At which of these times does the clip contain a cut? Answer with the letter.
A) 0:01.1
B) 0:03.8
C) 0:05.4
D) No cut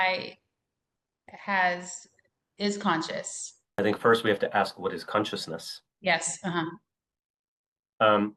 B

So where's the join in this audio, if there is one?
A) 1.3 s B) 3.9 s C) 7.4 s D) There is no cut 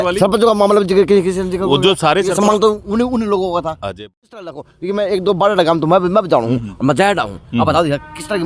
B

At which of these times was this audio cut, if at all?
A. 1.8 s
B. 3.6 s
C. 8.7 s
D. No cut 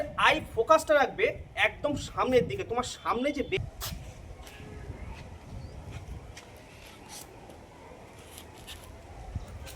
B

